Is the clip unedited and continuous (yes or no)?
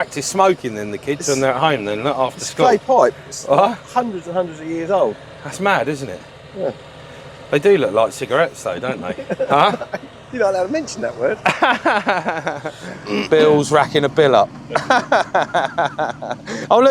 no